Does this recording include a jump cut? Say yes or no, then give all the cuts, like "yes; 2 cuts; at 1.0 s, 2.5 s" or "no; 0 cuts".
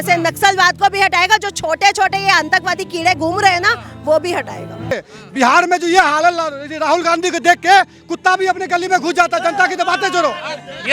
yes; 1 cut; at 4.9 s